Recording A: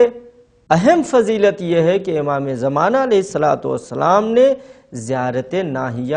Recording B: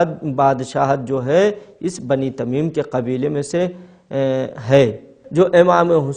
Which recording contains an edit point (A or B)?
B